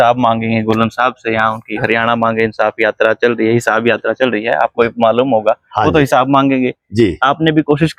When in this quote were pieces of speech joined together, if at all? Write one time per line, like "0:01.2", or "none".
none